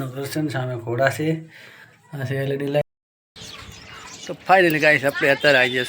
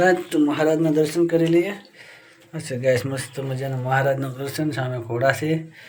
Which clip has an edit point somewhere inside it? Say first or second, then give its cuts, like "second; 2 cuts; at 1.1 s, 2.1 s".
first; 1 cut; at 2.8 s